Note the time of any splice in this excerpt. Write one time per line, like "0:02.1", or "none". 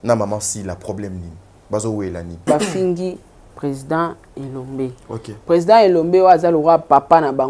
0:02.4